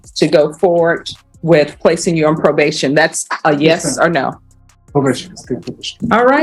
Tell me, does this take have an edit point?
no; 0 cuts

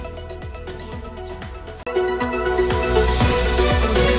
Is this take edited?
yes; 1 cut; at 1.8 s

